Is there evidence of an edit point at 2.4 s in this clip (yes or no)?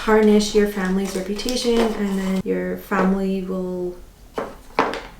yes